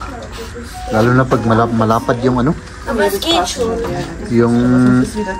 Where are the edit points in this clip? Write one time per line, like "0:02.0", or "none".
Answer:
none